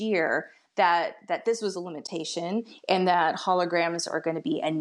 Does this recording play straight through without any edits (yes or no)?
yes